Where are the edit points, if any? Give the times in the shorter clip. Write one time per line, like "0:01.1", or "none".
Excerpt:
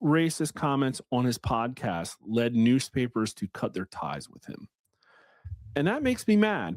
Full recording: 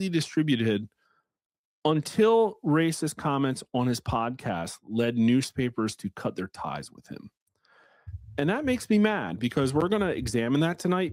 none